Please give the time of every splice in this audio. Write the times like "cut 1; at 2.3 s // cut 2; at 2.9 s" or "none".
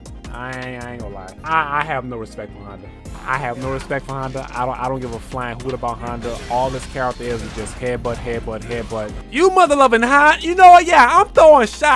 cut 1; at 1.3 s // cut 2; at 9.2 s